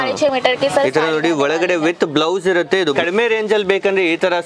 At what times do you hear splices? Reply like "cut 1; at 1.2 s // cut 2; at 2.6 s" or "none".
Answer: cut 1; at 3.0 s